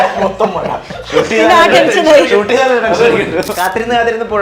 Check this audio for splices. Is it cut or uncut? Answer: cut